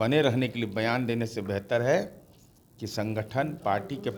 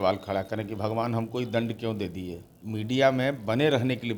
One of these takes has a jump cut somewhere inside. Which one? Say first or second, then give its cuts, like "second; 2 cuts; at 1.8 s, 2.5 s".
second; 1 cut; at 2.5 s